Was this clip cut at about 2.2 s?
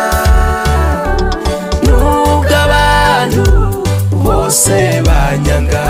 no; 0 cuts

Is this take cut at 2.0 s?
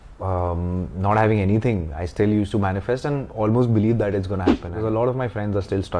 no; 1 cut; at 4.7 s

